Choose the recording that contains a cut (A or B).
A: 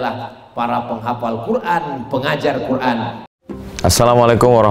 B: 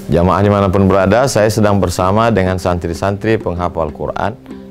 A